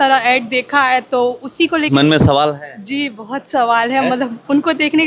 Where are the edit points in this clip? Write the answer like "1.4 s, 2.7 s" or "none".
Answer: 1.9 s